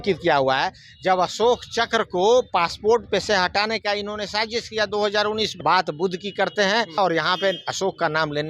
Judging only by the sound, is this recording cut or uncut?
cut